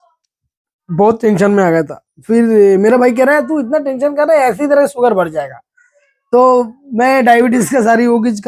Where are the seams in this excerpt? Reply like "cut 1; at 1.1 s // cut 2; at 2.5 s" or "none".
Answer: none